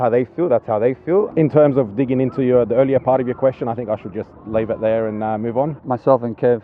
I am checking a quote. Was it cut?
yes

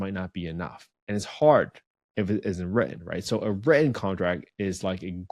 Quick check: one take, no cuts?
yes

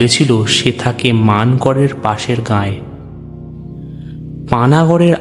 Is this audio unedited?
no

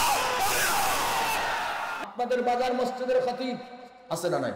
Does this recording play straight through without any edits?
no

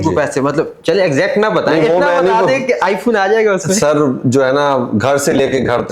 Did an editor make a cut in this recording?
no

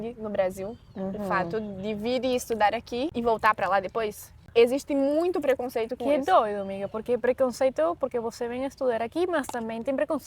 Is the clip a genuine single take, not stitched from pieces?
no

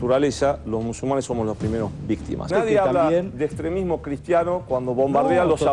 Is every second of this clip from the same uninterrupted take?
no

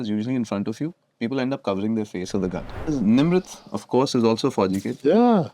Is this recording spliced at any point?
yes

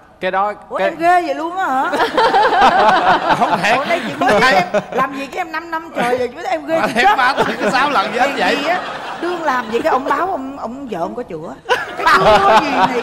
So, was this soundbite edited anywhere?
no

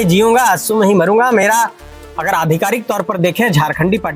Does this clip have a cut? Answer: no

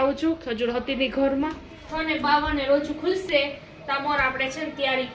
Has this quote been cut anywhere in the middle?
yes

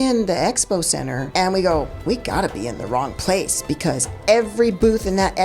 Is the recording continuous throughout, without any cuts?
no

